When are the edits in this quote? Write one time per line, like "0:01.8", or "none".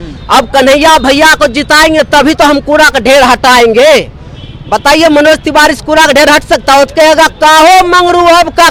none

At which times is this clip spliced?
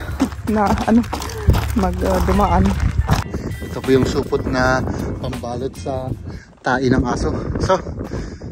0:03.3

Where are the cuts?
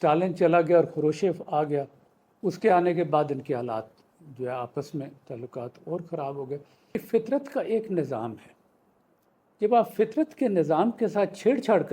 0:06.9

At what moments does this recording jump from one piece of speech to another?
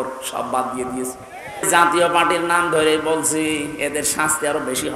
0:01.7

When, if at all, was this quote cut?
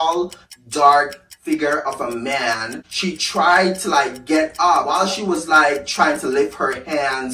0:02.8

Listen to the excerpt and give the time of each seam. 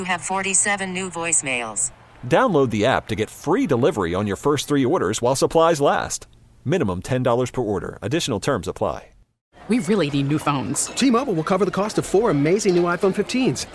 0:09.5

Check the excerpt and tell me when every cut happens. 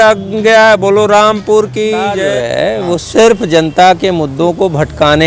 0:02.2

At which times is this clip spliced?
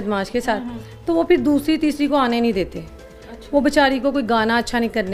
none

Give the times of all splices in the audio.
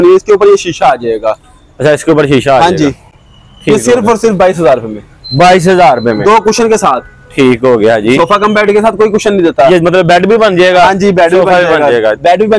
none

